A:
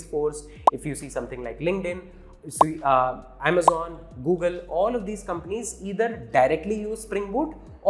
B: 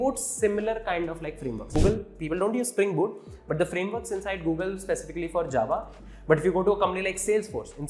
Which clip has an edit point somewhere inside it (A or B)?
B